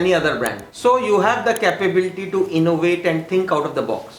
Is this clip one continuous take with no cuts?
yes; 0 cuts

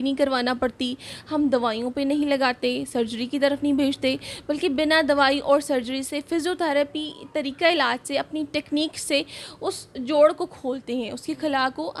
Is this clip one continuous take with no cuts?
yes; 0 cuts

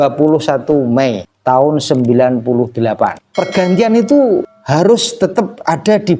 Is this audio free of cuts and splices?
no; 3 cuts; at 1.3 s, 3.2 s, 4.6 s

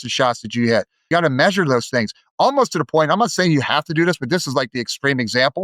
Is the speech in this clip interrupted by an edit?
yes; 1 cut; at 1.1 s

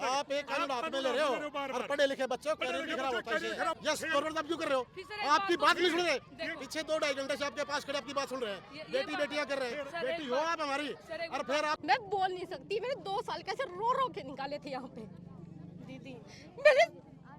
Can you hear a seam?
yes; 2 cuts; at 3.7 s, 11.8 s

